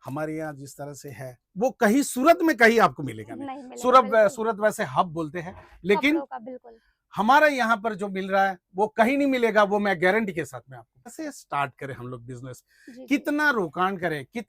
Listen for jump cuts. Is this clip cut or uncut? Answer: cut